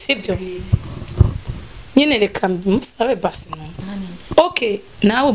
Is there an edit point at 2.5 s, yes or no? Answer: no